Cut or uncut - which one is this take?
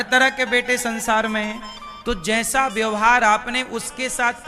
uncut